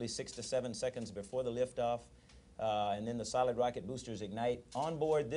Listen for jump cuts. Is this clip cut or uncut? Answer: uncut